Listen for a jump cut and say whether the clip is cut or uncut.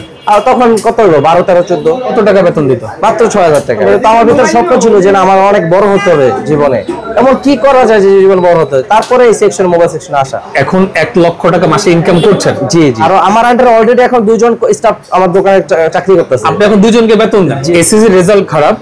cut